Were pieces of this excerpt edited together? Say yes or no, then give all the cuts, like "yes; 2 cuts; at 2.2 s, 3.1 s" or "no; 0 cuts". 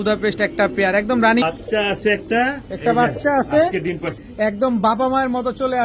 yes; 2 cuts; at 1.4 s, 4.2 s